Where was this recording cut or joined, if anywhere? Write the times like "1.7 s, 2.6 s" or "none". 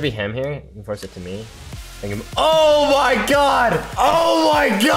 3.9 s